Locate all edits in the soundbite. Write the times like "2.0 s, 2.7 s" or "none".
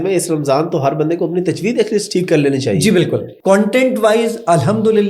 3.3 s